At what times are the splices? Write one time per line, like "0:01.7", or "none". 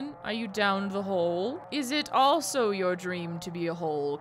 0:01.6